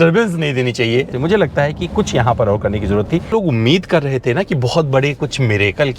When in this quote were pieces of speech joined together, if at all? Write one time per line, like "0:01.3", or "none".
0:01.1
0:03.3